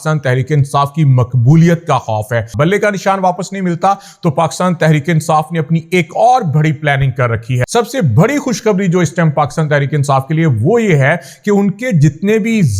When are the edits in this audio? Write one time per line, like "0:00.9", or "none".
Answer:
0:02.5
0:07.5